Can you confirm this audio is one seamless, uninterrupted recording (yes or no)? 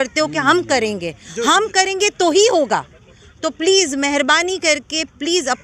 yes